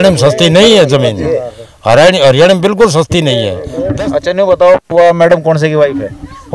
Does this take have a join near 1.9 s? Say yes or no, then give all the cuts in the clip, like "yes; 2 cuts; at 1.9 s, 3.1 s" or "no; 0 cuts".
no; 1 cut; at 3.8 s